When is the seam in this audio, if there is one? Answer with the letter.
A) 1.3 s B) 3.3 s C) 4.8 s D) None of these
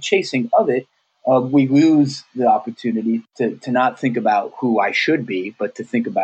B